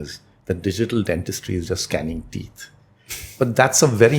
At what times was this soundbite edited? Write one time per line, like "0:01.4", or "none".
none

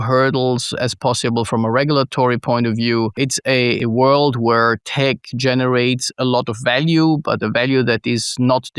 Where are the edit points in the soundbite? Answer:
0:03.1

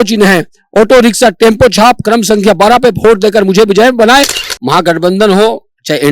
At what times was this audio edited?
0:04.4

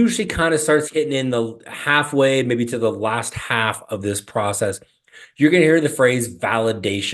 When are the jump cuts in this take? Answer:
none

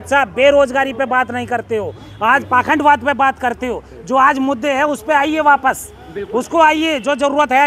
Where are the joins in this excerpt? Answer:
none

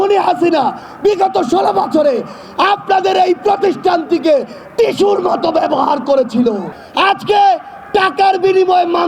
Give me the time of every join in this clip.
0:06.8

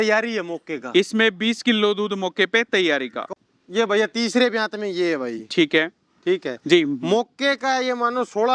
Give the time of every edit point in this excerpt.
0:03.3

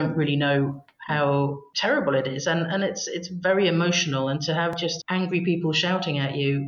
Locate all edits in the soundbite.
none

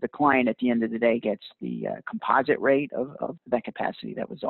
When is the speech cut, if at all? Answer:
0:03.4

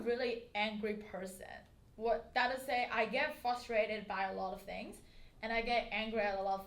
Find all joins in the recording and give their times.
none

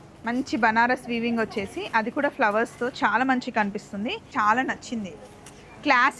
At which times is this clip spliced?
0:04.3

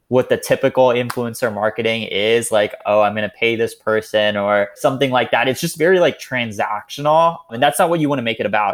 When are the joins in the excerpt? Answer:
none

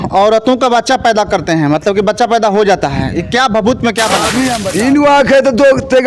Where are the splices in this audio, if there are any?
0:04.6

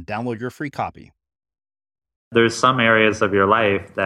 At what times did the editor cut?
0:02.3

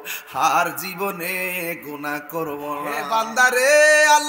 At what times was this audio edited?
0:03.0

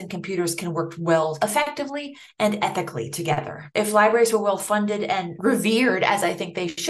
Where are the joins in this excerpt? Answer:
0:03.6

